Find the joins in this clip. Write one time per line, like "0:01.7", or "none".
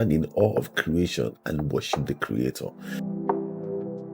0:02.8